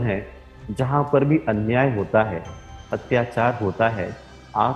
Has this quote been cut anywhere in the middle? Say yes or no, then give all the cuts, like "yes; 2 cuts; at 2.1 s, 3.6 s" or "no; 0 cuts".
no; 0 cuts